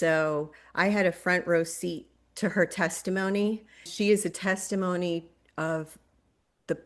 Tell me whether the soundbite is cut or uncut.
cut